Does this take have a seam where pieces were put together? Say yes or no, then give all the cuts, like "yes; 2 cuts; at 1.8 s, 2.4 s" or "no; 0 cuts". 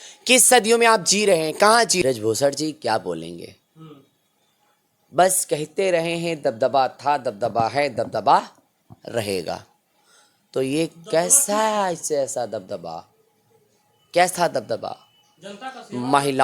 yes; 1 cut; at 2.0 s